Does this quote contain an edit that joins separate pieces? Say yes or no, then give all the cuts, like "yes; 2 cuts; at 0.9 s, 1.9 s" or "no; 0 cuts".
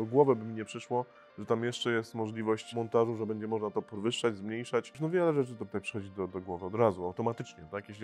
yes; 2 cuts; at 2.7 s, 5.1 s